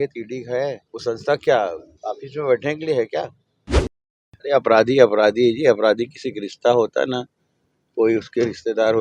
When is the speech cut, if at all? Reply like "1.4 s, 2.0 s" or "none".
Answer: 0.9 s, 1.9 s, 3.9 s